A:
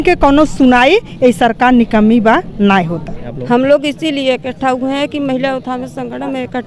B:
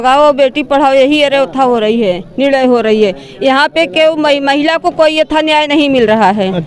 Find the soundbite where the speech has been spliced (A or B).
A